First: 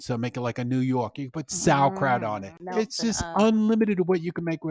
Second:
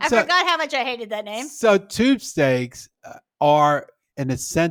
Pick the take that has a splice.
first; 1 cut; at 2.6 s

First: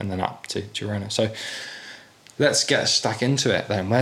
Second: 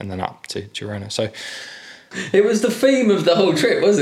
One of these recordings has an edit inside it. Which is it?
second; 1 cut; at 2.1 s

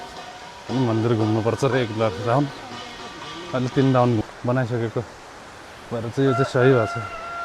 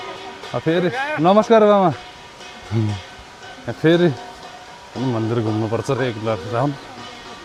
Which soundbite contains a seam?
first; 1 cut; at 4.2 s

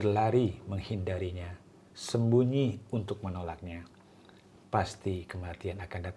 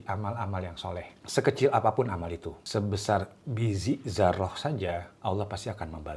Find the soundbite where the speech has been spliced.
second; 3 cuts; at 1.2 s, 2.5 s, 5.1 s

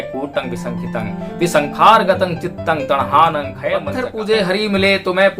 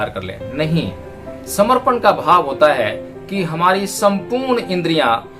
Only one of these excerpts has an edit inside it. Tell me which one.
first; 1 cut; at 3.9 s

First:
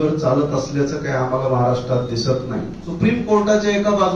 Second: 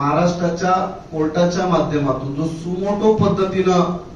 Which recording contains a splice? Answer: first; 1 cut; at 2.8 s

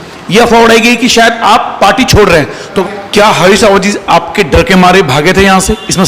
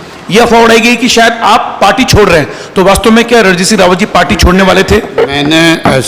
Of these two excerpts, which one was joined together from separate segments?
first; 1 cut; at 2.8 s

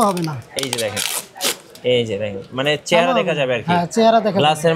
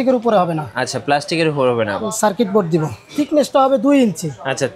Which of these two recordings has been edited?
second; 1 cut; at 3.1 s

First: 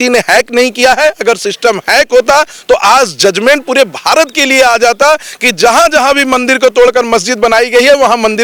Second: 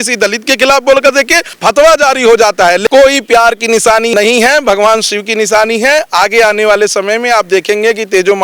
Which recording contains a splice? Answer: second; 3 cuts; at 1.5 s, 2.8 s, 4.1 s

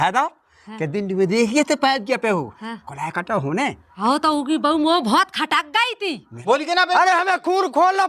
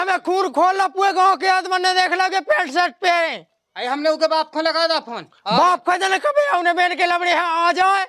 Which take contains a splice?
first; 2 cuts; at 3.9 s, 6.3 s

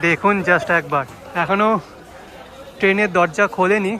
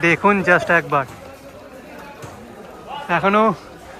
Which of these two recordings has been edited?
first; 1 cut; at 1.2 s

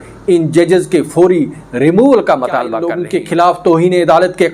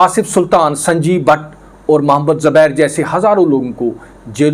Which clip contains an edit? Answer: first; 1 cut; at 2.9 s

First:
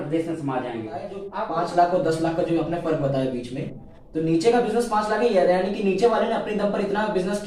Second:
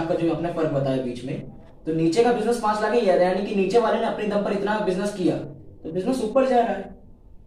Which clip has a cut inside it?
first; 1 cut; at 1.2 s

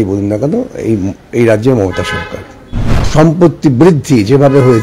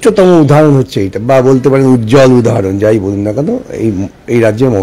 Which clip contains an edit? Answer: first; 1 cut; at 3.0 s

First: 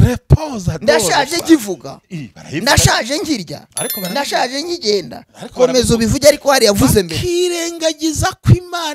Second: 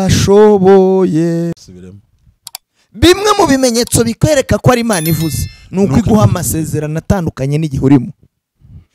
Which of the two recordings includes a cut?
second; 1 cut; at 1.5 s

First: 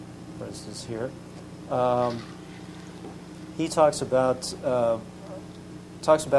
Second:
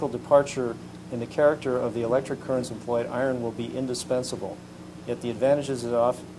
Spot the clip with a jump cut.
second; 1 cut; at 3.9 s

